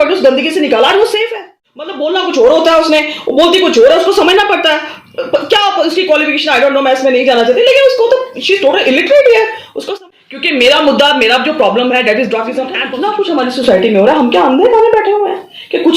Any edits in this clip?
yes; 3 cuts; at 2.0 s, 9.9 s, 13.0 s

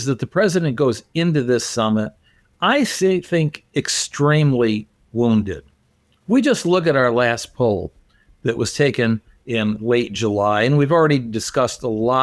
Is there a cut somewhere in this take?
no; 0 cuts

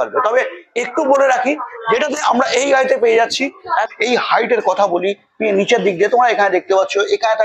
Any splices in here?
yes; 1 cut; at 3.8 s

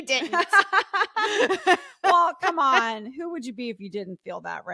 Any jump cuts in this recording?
no; 0 cuts

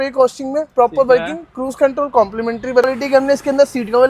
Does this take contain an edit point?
yes; 1 cut; at 2.9 s

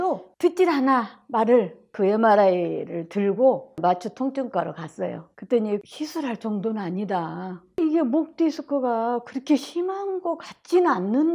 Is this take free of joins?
no; 4 cuts; at 1.9 s, 3.8 s, 5.9 s, 7.7 s

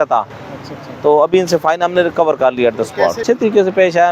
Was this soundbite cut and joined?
no; 0 cuts

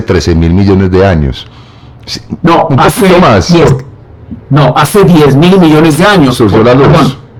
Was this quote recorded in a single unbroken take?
yes; 0 cuts

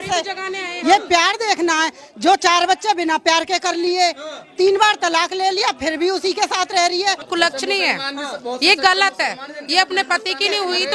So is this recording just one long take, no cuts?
no; 1 cut; at 7.2 s

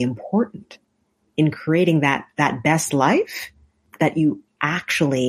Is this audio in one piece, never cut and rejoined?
no; 1 cut; at 3.9 s

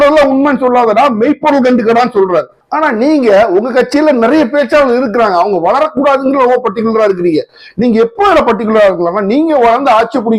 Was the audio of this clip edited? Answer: yes; 1 cut; at 2.6 s

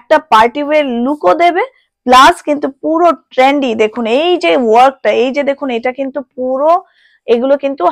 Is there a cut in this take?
no; 0 cuts

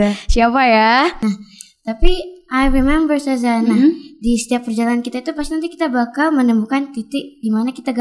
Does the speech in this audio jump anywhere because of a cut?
yes; 1 cut; at 1.2 s

